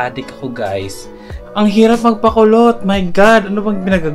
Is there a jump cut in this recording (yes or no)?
yes